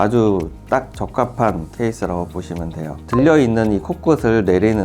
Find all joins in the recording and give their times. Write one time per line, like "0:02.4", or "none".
0:03.0

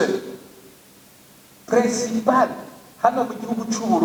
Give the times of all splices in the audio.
none

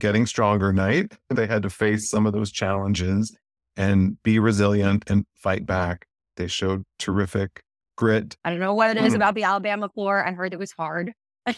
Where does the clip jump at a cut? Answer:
0:01.3
0:06.3
0:08.3

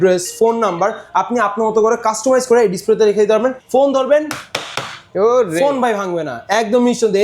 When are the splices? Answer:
0:03.6

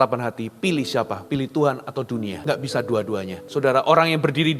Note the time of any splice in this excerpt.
0:01.2
0:02.4
0:03.4

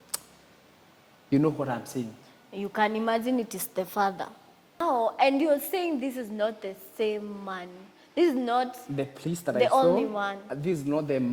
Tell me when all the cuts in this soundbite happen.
0:04.8

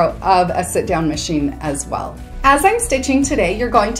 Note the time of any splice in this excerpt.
0:02.2

